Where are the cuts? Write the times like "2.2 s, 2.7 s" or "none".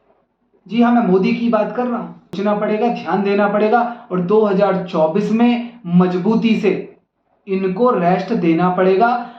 2.4 s